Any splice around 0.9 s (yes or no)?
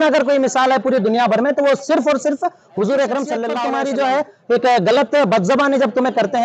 no